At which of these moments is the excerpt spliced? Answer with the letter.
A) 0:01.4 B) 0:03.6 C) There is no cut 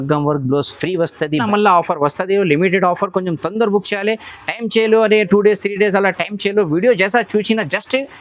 A